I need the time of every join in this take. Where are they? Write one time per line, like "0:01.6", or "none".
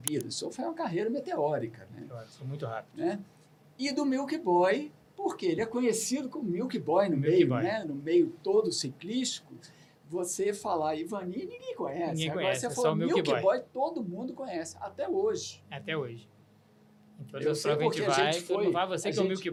none

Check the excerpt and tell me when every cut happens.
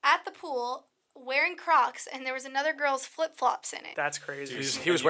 0:03.8

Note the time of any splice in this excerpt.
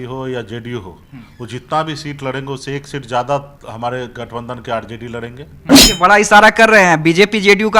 0:05.7

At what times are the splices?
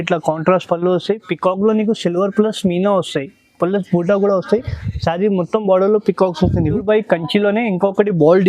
0:06.8

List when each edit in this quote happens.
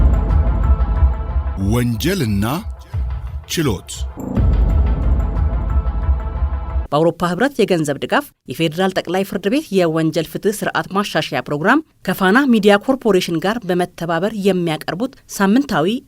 0:01.5
0:04.1
0:06.8

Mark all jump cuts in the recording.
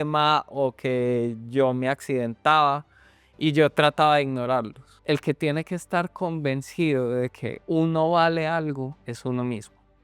0:04.9
0:07.5
0:09.0

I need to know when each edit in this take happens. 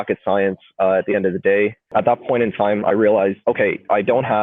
0:01.9
0:03.4

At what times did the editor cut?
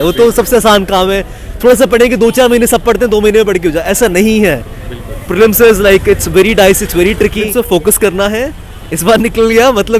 0:07.5

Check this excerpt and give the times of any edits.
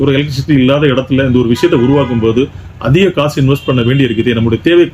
none

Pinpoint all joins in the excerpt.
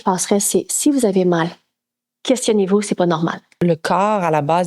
0:03.6

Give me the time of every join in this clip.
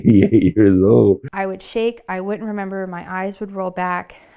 0:01.3

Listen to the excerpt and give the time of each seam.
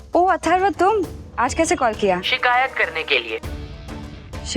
0:01.2
0:02.3

